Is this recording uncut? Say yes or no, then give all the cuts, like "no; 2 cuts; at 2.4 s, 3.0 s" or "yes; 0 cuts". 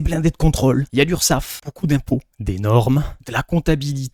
yes; 0 cuts